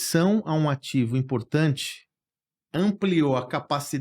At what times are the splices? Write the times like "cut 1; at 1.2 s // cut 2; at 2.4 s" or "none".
none